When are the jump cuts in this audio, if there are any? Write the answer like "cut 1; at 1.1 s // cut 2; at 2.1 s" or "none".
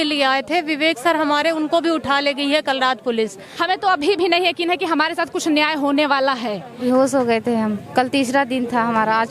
cut 1; at 3.5 s // cut 2; at 6.8 s

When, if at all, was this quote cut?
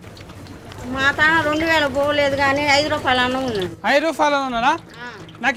none

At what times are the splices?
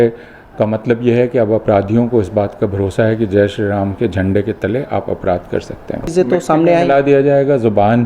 cut 1; at 6.0 s

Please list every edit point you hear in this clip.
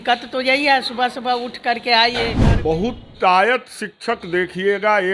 cut 1; at 2.4 s

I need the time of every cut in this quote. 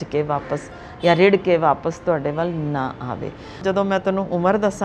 cut 1; at 3.6 s

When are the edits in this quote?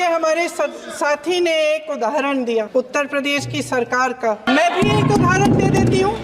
cut 1; at 2.9 s // cut 2; at 4.5 s

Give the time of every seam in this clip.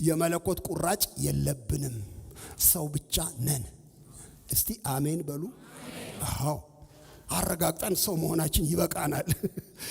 none

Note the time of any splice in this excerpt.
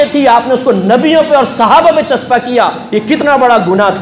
none

